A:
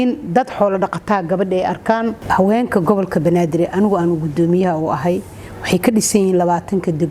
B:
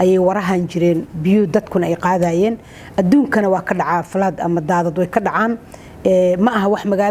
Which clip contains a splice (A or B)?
A